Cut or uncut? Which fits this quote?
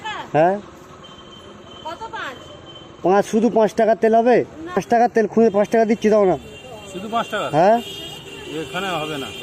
cut